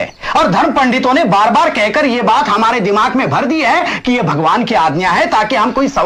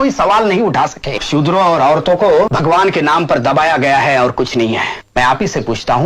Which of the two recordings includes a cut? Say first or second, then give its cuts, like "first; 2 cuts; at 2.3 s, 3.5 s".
second; 3 cuts; at 1.2 s, 2.5 s, 5.0 s